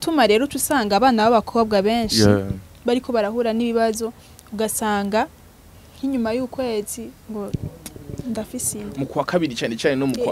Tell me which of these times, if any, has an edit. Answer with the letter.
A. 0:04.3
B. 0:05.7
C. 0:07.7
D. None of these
D